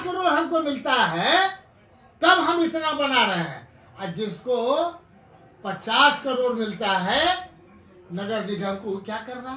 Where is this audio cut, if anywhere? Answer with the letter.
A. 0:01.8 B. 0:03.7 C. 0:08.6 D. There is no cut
D